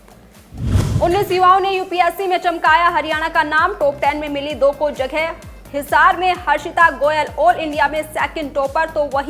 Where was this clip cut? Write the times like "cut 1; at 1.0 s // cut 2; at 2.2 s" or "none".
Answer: cut 1; at 1.0 s